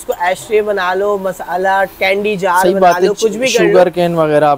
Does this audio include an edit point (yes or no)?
no